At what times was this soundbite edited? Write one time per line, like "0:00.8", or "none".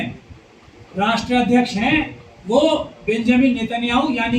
none

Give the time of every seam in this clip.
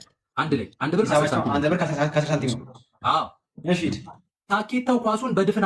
none

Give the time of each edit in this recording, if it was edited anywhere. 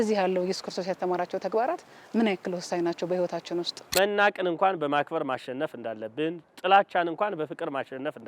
0:03.9

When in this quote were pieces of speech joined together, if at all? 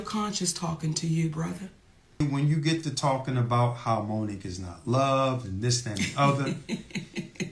0:02.2

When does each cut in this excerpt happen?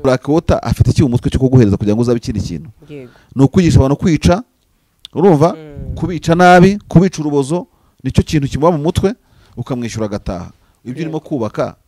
none

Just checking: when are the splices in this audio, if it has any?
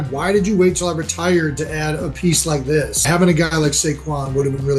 0:03.0

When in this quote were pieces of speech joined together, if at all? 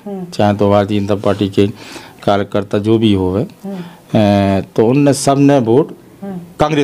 none

